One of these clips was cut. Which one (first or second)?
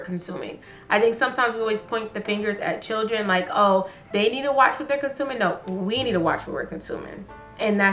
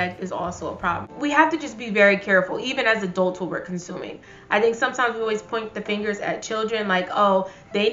second